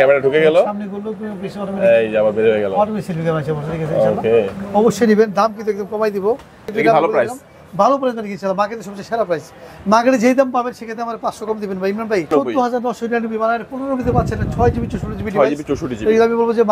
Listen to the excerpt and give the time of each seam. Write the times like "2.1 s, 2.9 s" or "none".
6.7 s, 12.3 s